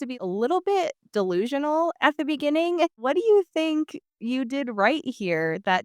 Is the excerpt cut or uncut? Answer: cut